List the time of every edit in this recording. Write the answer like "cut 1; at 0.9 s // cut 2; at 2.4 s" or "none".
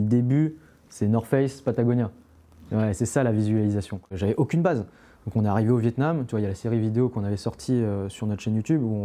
cut 1; at 4.2 s